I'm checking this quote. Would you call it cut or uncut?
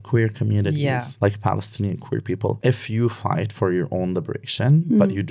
cut